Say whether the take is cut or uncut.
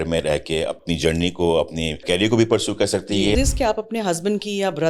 cut